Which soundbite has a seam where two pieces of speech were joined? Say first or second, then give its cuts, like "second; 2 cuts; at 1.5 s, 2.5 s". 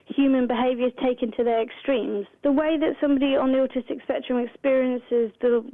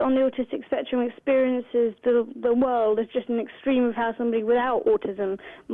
first; 1 cut; at 2.3 s